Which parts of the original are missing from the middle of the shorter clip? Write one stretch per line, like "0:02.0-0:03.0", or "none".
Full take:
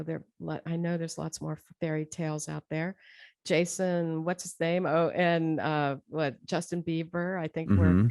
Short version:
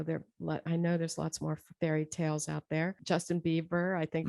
0:03.0-0:06.4